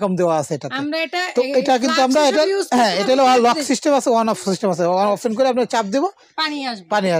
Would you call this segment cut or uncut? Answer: uncut